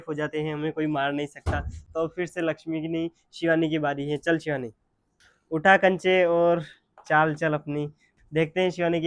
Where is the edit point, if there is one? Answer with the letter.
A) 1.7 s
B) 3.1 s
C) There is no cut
C